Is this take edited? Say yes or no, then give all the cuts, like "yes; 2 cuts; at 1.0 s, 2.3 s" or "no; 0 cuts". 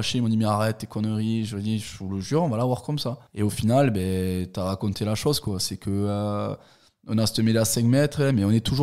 no; 0 cuts